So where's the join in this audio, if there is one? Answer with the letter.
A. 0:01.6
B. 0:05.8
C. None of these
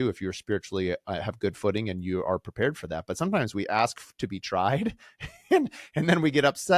C